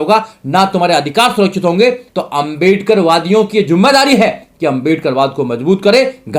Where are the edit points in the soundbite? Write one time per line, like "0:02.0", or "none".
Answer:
0:02.1